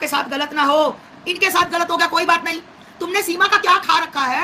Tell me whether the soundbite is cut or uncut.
uncut